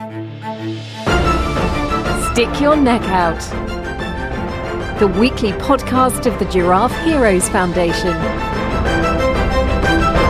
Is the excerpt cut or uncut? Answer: uncut